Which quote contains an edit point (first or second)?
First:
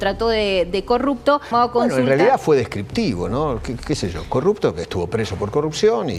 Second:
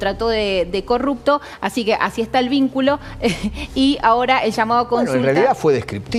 first